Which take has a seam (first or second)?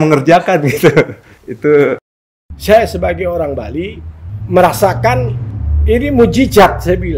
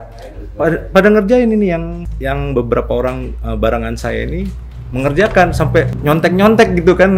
first